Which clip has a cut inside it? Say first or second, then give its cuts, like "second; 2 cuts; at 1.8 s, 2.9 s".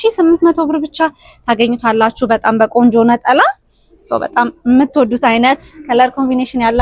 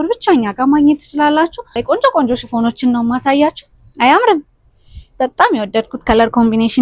second; 1 cut; at 1.8 s